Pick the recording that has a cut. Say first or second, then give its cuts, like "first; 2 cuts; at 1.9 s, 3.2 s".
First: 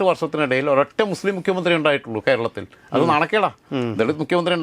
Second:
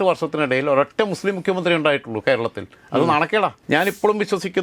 second; 1 cut; at 3.6 s